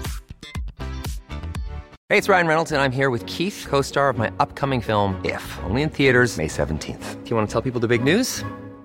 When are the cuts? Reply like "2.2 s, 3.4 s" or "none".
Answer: 1.9 s